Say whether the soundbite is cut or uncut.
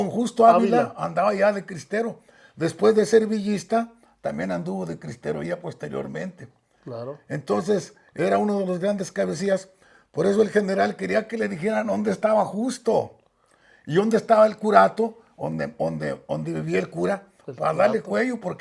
uncut